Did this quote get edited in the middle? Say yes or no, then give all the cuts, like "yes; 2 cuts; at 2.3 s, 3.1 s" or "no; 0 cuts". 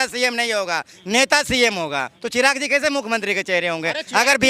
yes; 1 cut; at 2.2 s